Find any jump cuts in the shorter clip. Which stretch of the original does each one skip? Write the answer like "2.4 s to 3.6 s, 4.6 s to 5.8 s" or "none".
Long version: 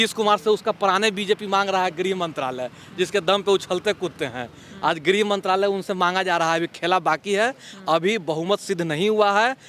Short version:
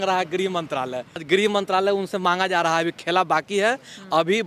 2.9 s to 5.0 s